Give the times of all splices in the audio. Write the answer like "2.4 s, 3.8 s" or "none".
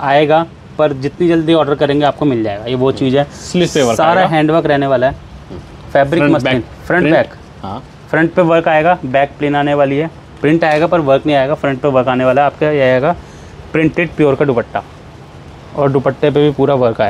none